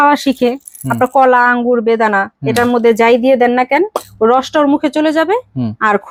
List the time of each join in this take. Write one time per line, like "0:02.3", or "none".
none